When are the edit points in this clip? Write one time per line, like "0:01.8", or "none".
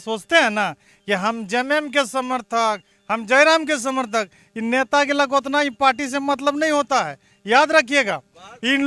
none